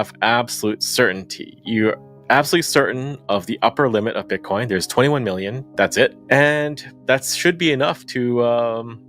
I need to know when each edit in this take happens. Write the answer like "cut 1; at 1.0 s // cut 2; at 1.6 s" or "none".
cut 1; at 6.2 s